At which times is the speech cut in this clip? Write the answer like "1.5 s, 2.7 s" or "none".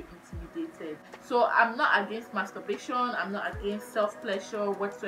1.1 s